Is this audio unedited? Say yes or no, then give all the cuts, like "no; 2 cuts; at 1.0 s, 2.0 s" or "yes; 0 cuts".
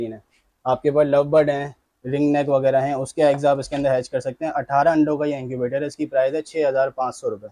yes; 0 cuts